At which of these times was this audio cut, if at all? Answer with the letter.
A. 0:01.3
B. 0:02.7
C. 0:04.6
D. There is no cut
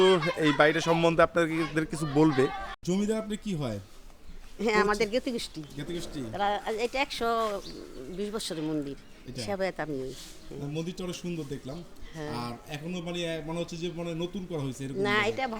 B